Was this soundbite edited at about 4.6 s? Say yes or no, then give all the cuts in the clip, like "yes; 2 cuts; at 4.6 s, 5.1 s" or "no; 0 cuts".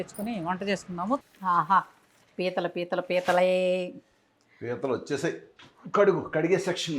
no; 1 cut; at 1.2 s